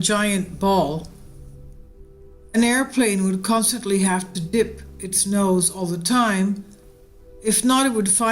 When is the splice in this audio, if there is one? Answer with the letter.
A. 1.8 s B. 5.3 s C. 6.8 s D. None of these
B